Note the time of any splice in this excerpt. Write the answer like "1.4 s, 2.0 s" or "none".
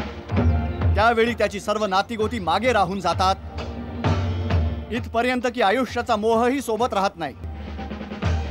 7.5 s